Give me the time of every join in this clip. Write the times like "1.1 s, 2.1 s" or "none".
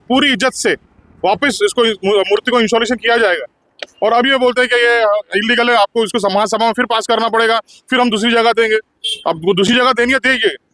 none